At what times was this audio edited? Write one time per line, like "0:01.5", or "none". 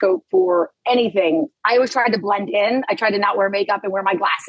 0:01.6